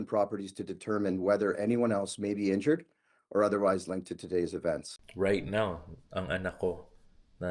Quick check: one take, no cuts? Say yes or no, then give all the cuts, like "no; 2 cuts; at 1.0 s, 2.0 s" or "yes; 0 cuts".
no; 1 cut; at 5.0 s